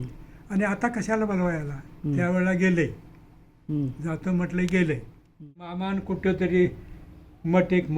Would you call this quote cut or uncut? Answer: cut